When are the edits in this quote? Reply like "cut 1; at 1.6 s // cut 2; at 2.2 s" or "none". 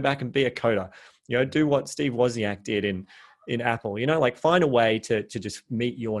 none